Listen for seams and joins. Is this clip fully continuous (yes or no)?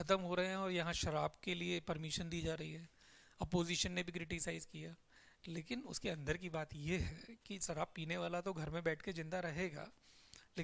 yes